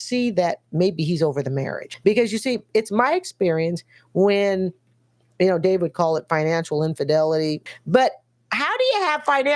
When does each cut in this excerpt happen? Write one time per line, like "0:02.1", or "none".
0:01.8
0:07.6